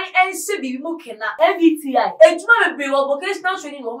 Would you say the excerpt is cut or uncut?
cut